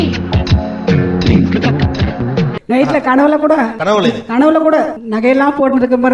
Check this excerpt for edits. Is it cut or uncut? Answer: cut